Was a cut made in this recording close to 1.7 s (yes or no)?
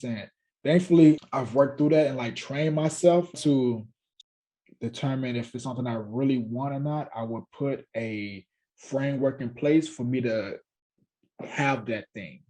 no